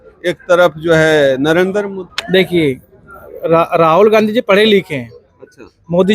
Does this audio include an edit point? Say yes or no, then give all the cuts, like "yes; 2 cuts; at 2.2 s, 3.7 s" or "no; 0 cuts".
yes; 1 cut; at 2.1 s